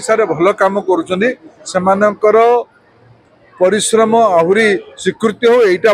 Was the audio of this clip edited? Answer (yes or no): no